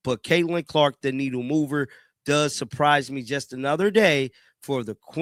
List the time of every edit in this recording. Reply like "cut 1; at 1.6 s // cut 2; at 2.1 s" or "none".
none

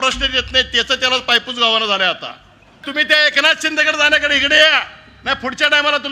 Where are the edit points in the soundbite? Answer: cut 1; at 2.8 s

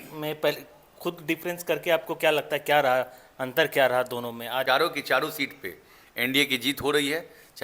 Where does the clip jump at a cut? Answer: cut 1; at 4.6 s

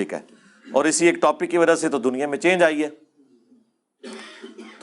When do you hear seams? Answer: none

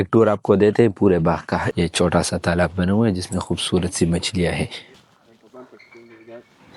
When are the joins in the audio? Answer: cut 1; at 1.7 s // cut 2; at 5.0 s

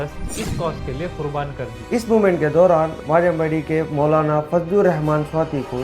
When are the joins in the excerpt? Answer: cut 1; at 1.8 s

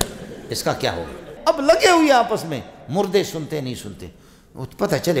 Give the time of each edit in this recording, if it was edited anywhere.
cut 1; at 1.3 s

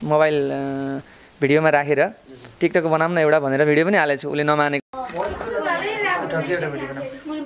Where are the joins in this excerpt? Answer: cut 1; at 4.8 s

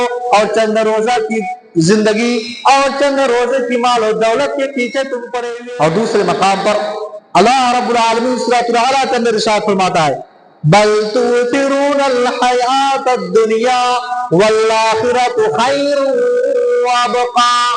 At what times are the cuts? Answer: cut 1; at 5.3 s

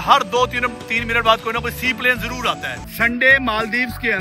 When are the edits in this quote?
cut 1; at 2.8 s

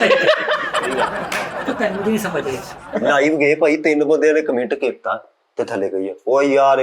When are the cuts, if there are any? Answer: cut 1; at 2.7 s

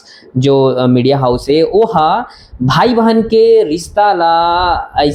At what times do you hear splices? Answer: none

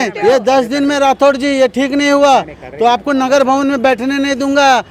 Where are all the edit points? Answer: none

